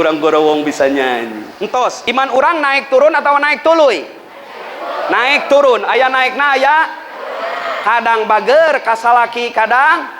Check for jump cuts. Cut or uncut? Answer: cut